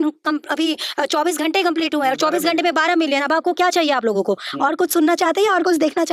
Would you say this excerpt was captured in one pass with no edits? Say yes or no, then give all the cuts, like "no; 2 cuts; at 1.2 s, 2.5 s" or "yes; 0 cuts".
yes; 0 cuts